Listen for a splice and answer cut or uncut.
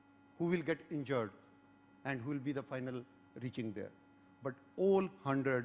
uncut